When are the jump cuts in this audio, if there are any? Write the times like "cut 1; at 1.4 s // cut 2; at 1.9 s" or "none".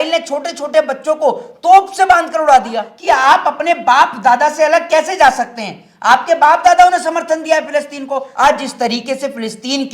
cut 1; at 2.9 s // cut 2; at 8.3 s